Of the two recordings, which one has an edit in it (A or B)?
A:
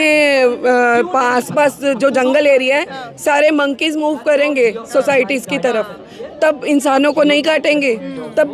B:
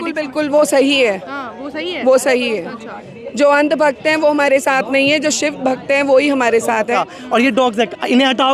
B